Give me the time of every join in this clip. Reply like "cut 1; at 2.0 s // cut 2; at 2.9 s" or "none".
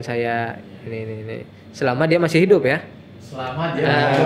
none